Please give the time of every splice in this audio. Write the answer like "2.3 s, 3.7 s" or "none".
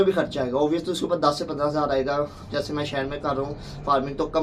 none